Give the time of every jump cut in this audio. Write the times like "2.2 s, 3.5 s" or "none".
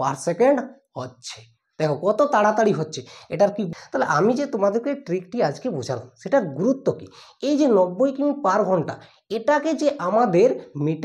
3.7 s